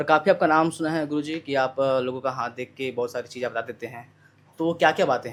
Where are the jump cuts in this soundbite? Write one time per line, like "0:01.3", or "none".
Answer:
none